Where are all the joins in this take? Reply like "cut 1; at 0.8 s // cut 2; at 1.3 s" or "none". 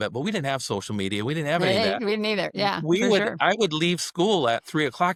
none

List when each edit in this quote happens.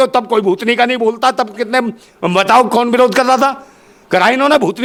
none

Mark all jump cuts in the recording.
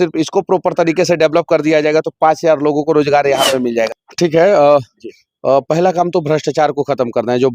cut 1; at 4.0 s

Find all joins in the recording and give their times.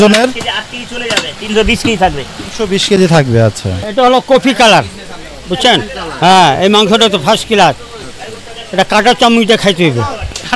cut 1; at 3.7 s

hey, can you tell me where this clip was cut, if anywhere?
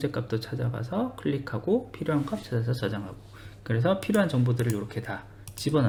none

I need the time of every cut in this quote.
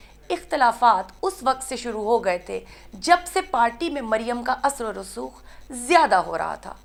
none

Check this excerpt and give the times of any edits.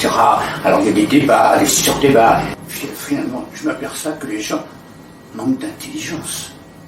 cut 1; at 2.6 s

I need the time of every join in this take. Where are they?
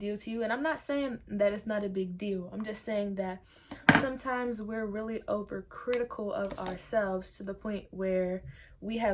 none

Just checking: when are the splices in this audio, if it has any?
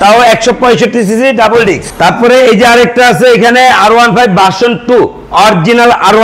cut 1; at 1.9 s

